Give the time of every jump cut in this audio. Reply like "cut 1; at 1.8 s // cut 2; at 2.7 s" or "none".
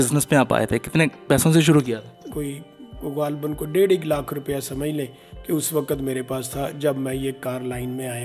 cut 1; at 2.3 s